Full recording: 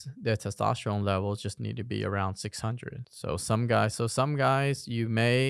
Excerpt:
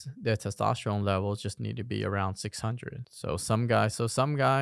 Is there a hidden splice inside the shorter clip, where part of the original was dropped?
no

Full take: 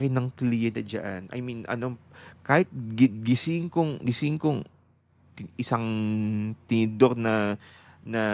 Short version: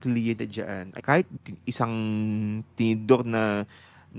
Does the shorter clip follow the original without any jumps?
no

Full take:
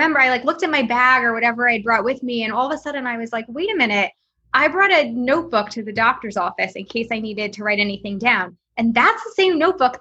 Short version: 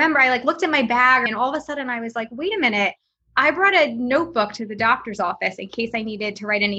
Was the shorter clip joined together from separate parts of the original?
yes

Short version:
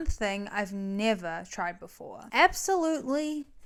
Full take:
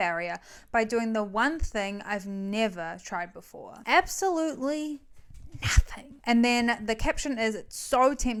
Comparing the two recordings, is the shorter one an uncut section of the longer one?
yes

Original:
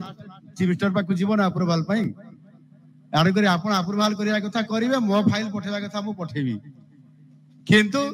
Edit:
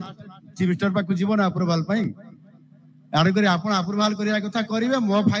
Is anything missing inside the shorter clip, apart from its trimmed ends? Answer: no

